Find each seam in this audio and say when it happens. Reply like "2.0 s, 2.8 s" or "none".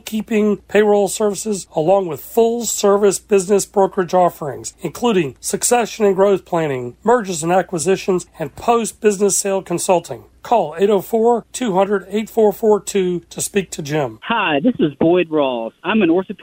14.1 s